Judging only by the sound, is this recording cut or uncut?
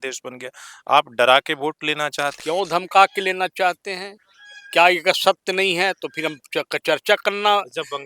cut